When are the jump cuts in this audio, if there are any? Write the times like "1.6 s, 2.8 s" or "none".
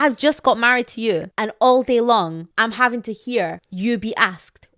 1.4 s, 2.4 s, 3.6 s